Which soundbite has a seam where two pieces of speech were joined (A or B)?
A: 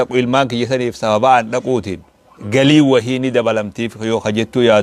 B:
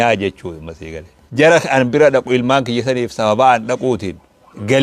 B